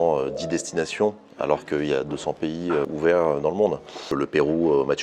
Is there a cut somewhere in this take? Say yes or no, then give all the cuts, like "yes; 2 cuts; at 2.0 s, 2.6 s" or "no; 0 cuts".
yes; 2 cuts; at 2.9 s, 4.1 s